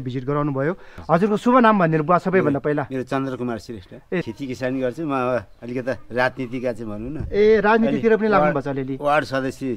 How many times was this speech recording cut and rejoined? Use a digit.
2